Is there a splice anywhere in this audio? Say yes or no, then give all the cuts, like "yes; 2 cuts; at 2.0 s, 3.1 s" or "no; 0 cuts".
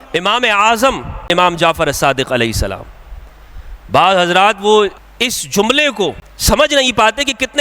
yes; 3 cuts; at 1.2 s, 5.1 s, 6.3 s